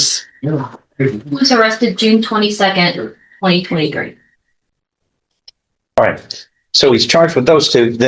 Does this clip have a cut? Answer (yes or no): no